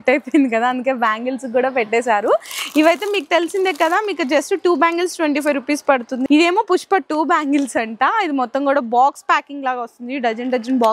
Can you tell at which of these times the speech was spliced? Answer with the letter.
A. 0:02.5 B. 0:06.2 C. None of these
B